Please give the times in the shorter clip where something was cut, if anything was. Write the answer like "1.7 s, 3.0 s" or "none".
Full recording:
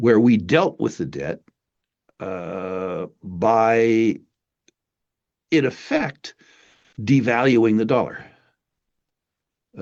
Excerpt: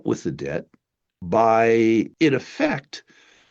1.1 s, 2.1 s